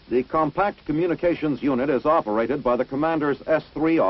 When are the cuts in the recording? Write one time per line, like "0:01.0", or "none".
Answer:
none